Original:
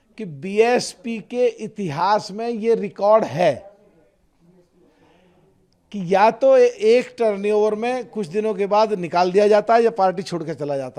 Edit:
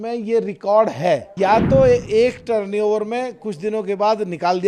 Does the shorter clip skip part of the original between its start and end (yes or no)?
yes